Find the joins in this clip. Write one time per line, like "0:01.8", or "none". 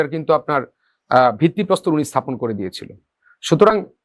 none